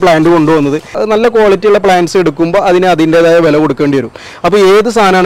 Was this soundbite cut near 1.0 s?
yes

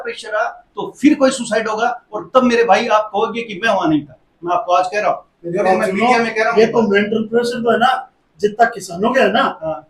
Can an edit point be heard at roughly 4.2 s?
no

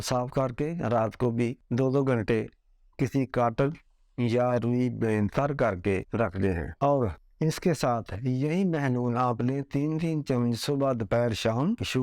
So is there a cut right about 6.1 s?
yes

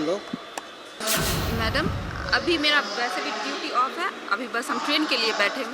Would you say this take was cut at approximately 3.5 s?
no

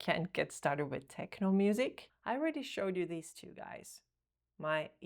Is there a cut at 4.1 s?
no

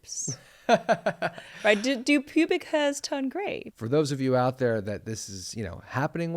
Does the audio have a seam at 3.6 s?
yes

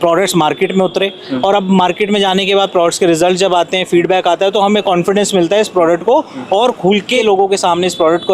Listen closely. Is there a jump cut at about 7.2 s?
yes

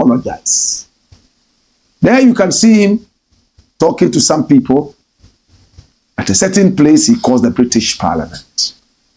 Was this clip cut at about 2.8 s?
no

